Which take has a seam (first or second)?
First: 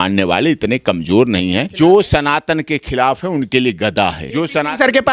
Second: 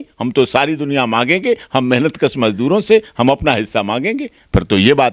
first